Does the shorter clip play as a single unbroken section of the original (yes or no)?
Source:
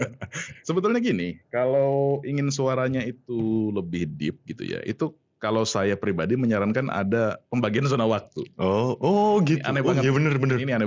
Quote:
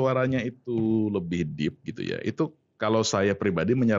yes